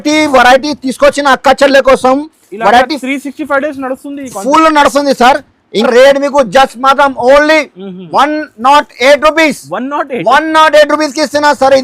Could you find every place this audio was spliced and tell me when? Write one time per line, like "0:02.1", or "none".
0:05.9